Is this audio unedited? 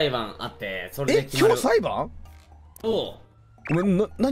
yes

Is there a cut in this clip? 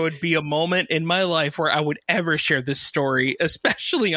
no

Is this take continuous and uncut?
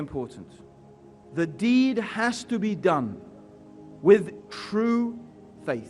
no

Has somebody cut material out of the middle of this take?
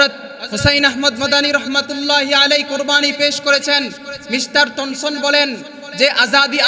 no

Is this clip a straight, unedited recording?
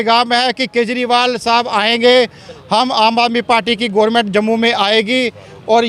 yes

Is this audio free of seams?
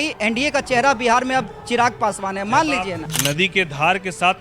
no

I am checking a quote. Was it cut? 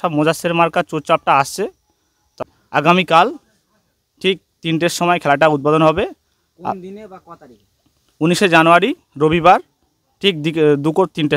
yes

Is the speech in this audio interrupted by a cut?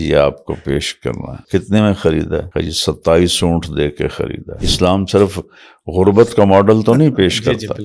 yes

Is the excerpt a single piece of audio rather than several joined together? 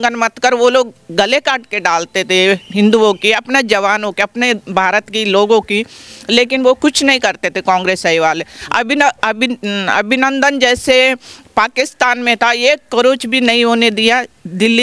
yes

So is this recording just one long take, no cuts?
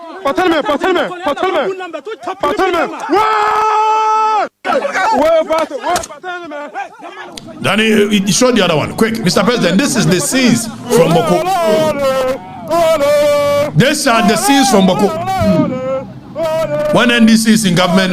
yes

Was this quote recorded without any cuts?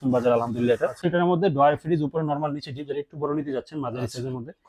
no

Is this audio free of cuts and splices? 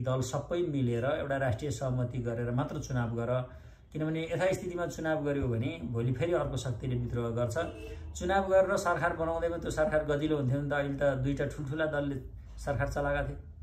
yes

